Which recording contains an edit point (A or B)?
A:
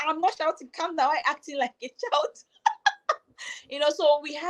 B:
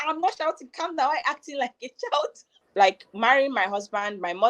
B